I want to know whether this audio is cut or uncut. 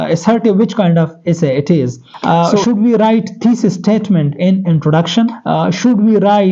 cut